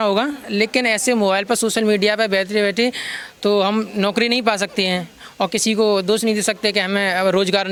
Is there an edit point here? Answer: no; 0 cuts

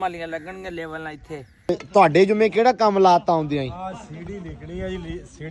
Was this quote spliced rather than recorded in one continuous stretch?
yes; 1 cut; at 1.8 s

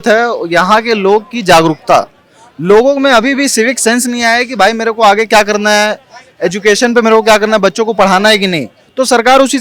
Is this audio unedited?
yes; 0 cuts

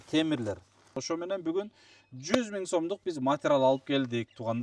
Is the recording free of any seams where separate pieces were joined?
no; 1 cut; at 0.9 s

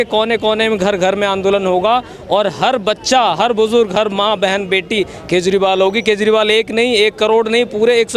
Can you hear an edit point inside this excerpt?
no; 0 cuts

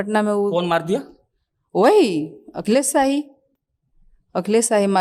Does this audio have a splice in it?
no; 0 cuts

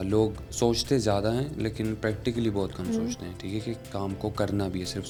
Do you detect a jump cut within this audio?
no; 0 cuts

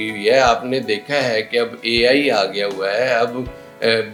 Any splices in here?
no; 0 cuts

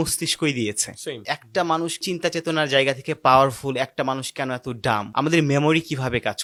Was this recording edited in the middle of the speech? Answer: no; 0 cuts

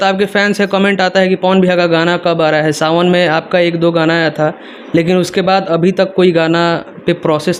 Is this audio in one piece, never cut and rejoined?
yes; 0 cuts

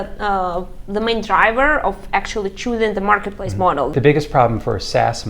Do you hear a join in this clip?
yes; 1 cut; at 3.9 s

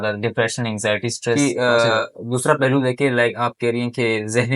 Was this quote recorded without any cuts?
no; 1 cut; at 1.4 s

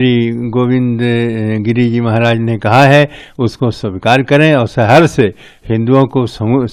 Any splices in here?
no; 0 cuts

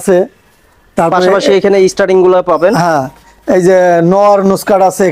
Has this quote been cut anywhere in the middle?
no; 0 cuts

